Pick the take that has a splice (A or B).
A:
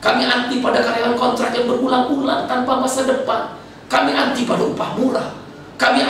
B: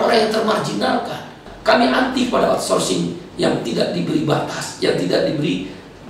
B